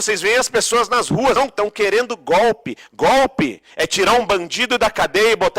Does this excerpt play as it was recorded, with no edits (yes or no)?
no